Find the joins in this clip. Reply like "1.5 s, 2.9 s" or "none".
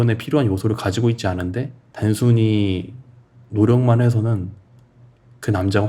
1.8 s